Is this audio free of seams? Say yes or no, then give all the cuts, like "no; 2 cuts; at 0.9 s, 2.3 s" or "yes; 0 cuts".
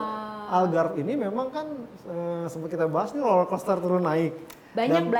yes; 0 cuts